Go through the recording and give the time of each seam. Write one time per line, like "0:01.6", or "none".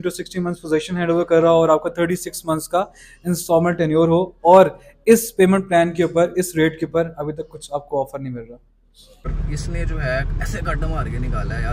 0:09.3